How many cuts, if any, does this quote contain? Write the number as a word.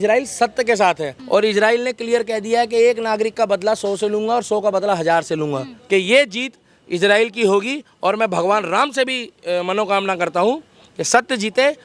two